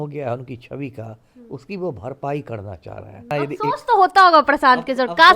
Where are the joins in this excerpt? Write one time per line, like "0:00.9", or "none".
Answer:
0:03.3